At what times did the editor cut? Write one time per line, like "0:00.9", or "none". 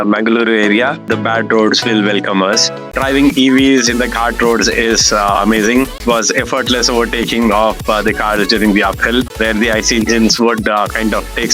0:01.0
0:02.9
0:06.0
0:09.3